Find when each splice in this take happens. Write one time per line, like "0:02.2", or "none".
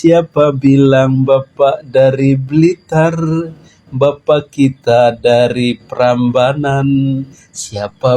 0:06.2